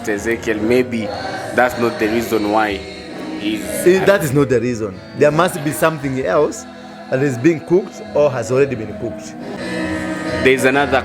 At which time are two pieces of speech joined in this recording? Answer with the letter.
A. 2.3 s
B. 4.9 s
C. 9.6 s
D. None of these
C